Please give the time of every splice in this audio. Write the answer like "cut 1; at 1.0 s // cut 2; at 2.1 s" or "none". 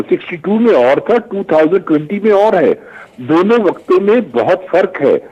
none